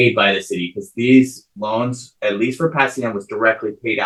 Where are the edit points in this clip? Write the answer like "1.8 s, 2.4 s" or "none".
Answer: none